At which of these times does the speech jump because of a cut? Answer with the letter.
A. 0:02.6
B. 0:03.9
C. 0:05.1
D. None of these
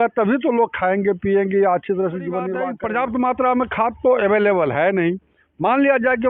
A